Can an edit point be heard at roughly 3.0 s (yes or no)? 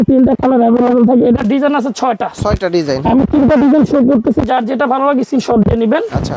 no